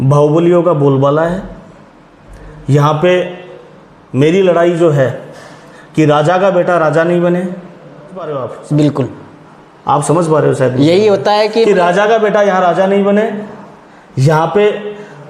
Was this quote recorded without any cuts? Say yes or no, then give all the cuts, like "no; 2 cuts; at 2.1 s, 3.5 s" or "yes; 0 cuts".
no; 1 cut; at 8.3 s